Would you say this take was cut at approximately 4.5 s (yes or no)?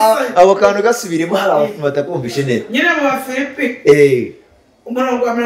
no